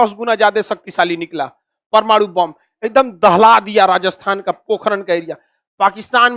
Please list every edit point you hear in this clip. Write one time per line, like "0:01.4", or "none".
none